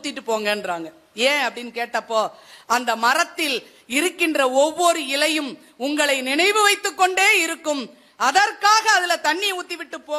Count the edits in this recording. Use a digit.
0